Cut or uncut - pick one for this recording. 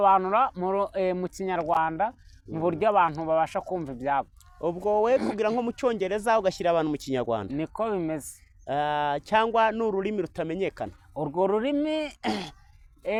uncut